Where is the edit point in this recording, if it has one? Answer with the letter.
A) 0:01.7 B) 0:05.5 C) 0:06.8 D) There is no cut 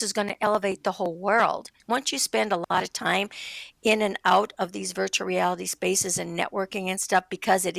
A